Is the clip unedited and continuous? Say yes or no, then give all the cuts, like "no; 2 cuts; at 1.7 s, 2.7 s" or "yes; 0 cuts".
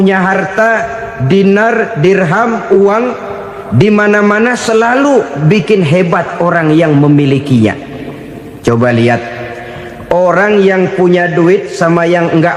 yes; 0 cuts